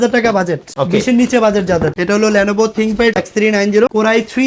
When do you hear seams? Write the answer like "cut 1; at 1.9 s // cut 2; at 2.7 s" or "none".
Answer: cut 1; at 1.9 s // cut 2; at 3.2 s